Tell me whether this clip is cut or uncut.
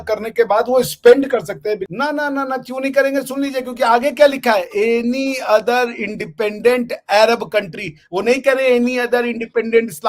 cut